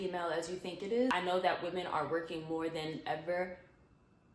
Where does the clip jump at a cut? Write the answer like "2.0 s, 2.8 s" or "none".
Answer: 1.1 s